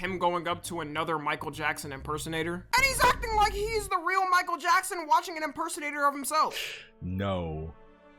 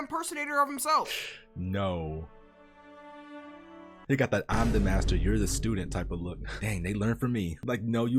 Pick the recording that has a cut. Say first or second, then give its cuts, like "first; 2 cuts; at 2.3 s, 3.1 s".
second; 1 cut; at 4.0 s